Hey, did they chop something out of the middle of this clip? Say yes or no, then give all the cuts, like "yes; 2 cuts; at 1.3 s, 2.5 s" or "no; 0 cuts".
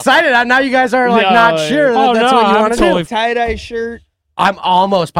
yes; 1 cut; at 3.1 s